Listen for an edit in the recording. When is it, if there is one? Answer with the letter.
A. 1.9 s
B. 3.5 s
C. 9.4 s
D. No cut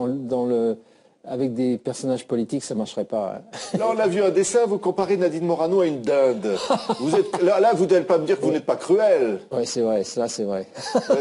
B